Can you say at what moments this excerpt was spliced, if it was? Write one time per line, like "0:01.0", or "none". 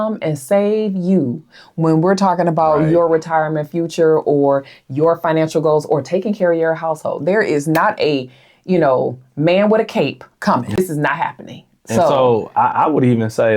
0:10.8